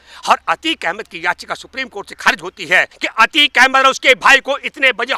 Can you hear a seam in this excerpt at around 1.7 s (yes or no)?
no